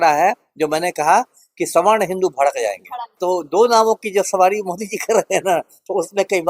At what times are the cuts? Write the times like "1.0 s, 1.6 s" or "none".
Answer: 3.2 s